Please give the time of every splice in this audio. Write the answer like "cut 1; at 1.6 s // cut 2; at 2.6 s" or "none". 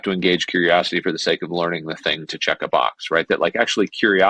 none